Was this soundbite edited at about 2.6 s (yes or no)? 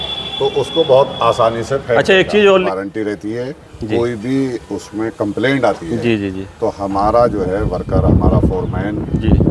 yes